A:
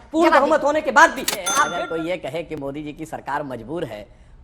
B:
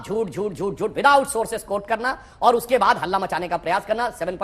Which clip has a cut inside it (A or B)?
A